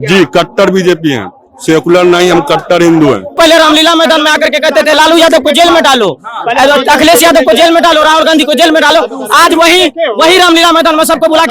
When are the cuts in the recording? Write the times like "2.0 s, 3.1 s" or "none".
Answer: 3.3 s